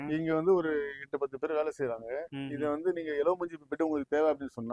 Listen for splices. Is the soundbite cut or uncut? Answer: uncut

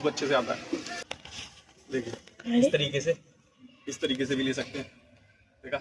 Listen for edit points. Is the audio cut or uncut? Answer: cut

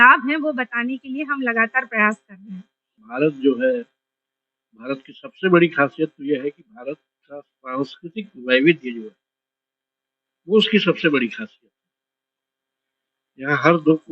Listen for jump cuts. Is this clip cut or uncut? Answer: cut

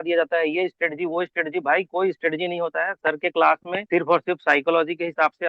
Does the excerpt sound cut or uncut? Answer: uncut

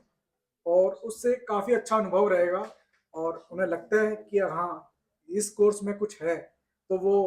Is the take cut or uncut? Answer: uncut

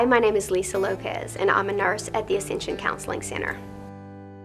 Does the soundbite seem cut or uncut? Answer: cut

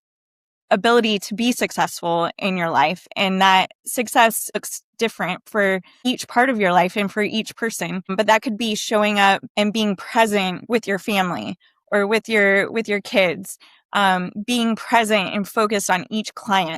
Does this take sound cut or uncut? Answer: cut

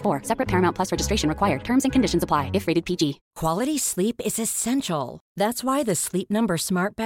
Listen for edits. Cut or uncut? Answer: cut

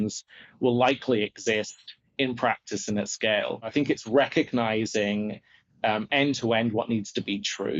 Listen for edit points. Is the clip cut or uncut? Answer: cut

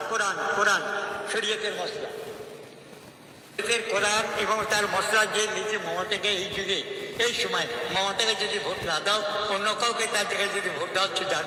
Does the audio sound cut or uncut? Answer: uncut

